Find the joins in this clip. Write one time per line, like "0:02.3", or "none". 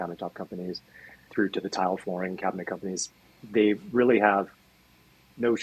0:01.2
0:03.3